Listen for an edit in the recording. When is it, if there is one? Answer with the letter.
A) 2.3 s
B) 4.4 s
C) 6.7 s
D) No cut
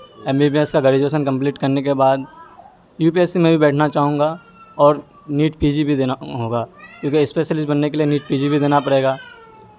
D